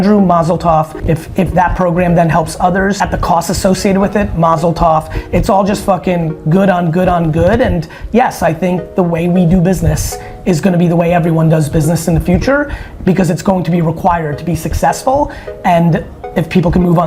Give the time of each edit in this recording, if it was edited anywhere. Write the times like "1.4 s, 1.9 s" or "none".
0.9 s, 3.0 s